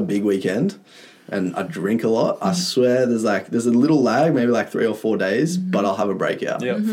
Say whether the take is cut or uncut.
uncut